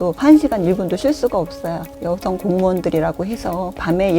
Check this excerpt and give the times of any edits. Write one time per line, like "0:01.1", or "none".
0:01.9